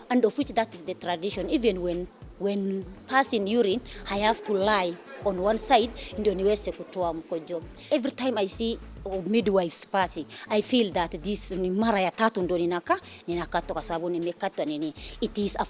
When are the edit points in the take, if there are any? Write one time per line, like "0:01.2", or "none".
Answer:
0:07.7